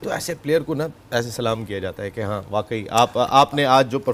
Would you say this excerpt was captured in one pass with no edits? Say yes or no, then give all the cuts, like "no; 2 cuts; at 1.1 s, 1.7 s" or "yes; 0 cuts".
yes; 0 cuts